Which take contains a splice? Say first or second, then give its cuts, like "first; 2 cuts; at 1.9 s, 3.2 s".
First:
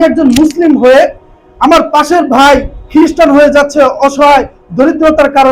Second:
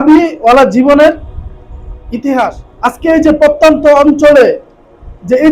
second; 1 cut; at 2.7 s